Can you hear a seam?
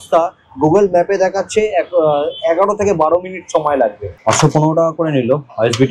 yes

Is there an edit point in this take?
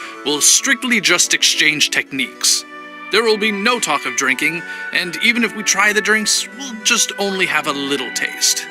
no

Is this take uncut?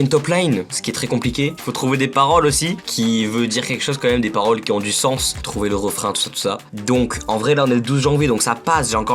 yes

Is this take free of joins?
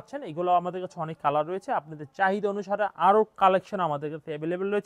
yes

